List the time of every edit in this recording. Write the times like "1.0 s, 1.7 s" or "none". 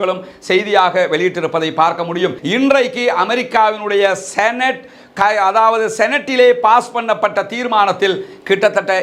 2.4 s